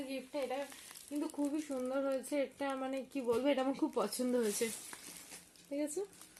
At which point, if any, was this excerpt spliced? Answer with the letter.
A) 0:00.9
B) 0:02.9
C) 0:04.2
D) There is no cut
D